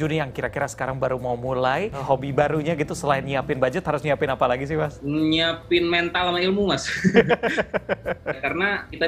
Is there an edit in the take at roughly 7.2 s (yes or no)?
no